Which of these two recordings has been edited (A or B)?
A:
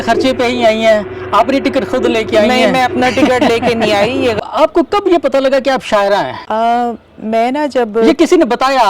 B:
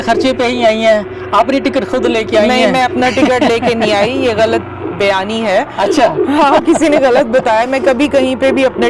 A